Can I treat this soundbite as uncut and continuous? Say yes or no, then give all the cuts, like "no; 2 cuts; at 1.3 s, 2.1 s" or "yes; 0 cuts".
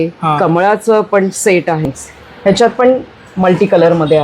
no; 1 cut; at 1.8 s